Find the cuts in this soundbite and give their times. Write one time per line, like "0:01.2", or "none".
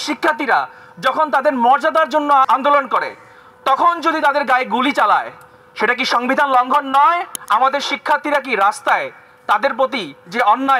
0:02.5
0:07.3